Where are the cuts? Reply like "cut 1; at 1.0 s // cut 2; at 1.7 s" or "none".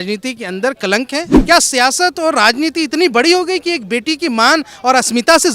cut 1; at 1.3 s